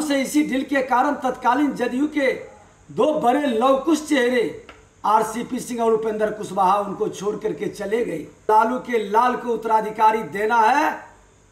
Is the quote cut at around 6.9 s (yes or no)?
no